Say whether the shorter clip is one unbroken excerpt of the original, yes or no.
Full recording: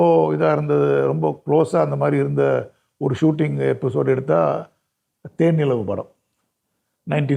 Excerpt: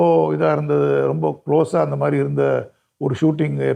yes